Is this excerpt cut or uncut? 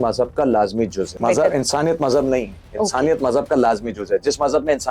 cut